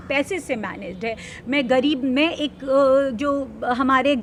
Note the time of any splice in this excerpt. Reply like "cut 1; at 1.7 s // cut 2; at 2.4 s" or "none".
none